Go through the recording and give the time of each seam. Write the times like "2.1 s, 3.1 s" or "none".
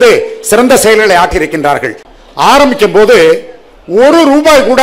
2.1 s